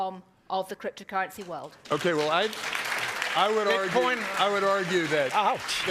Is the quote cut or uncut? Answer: uncut